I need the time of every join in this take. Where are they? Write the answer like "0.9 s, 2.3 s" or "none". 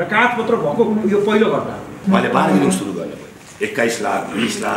2.0 s